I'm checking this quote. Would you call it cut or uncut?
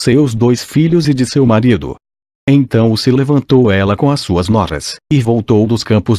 cut